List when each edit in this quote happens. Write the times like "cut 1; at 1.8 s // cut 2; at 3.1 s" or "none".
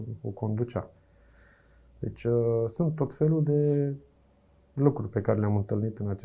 none

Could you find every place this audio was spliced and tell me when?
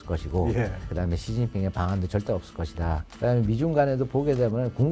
cut 1; at 1.0 s // cut 2; at 3.1 s

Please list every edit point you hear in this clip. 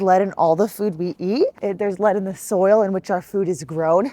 cut 1; at 1.6 s

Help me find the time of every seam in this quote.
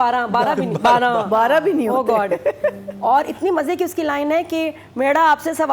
none

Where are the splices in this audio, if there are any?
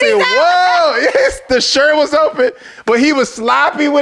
none

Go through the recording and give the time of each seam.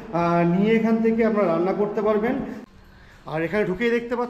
cut 1; at 2.6 s

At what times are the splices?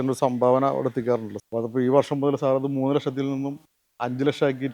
cut 1; at 1.3 s

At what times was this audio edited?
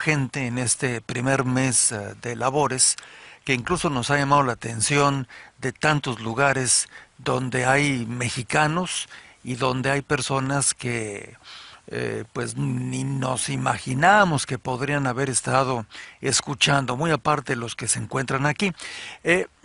cut 1; at 8.9 s

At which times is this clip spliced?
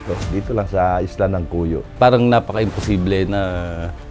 cut 1; at 1.9 s

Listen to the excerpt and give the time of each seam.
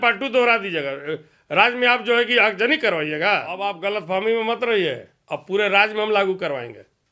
cut 1; at 3.7 s

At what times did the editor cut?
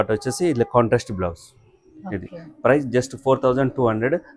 none

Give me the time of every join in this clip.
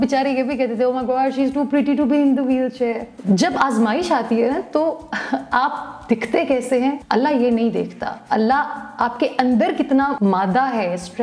cut 1; at 3.1 s // cut 2; at 7.0 s // cut 3; at 10.1 s

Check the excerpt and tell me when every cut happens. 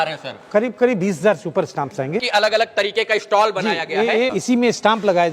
cut 1; at 2.2 s // cut 2; at 4.4 s

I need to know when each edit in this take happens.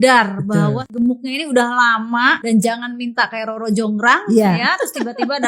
cut 1; at 0.8 s // cut 2; at 2.4 s

